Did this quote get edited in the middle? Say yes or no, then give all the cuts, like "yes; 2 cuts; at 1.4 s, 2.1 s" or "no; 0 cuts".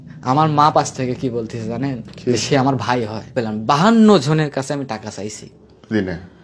yes; 1 cut; at 3.4 s